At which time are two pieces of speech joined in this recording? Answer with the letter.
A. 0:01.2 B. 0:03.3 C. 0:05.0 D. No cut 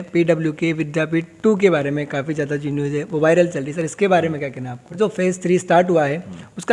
C